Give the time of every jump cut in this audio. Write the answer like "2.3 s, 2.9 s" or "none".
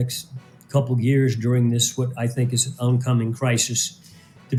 none